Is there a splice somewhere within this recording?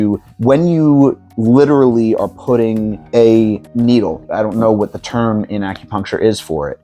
no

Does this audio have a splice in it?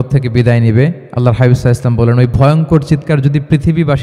yes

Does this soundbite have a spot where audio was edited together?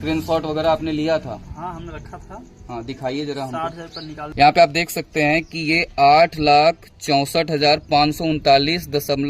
yes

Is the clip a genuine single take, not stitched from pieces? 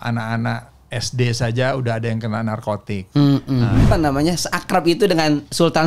no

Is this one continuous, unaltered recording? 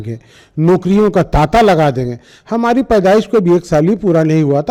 yes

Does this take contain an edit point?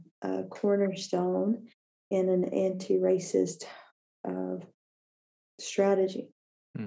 no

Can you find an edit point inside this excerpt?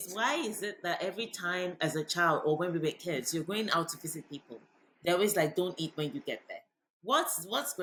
no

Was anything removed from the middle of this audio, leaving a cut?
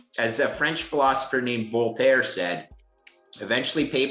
no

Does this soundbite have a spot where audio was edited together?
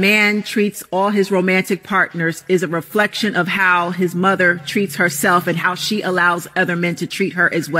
no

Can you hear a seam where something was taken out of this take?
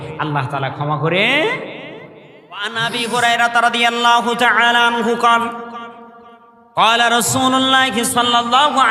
yes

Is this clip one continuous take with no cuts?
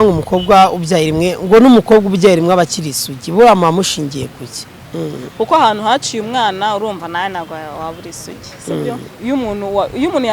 no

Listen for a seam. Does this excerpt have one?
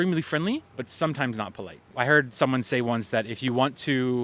yes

